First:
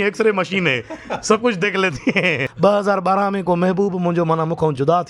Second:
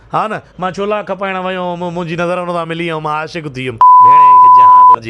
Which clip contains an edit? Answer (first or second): first